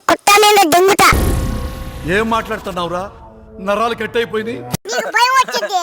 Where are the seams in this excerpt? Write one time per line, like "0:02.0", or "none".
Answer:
0:00.9
0:04.8